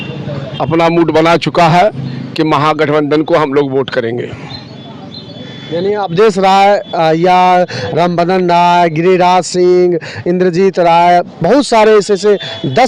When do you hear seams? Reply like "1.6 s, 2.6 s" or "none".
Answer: none